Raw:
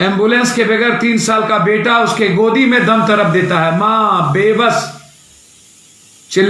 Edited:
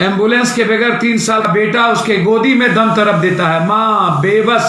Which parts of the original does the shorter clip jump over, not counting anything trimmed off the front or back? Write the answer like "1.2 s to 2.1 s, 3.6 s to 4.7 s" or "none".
1.4 s to 1.5 s